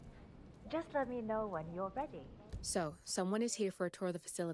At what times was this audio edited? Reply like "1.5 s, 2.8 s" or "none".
2.6 s